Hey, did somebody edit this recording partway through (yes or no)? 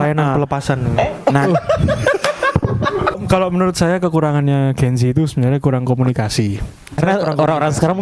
yes